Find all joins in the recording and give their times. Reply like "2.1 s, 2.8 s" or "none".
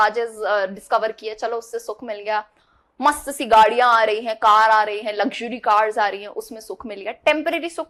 none